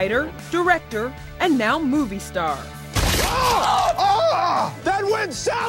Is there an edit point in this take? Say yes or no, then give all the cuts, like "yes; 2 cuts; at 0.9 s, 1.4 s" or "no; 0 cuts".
yes; 1 cut; at 3.9 s